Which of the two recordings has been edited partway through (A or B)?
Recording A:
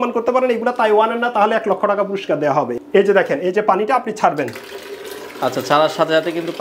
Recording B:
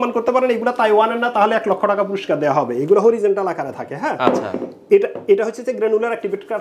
A